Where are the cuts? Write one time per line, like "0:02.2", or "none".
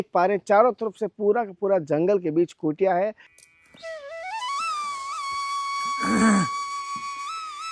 none